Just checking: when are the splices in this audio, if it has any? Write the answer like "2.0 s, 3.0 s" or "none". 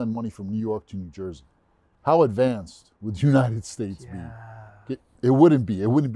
none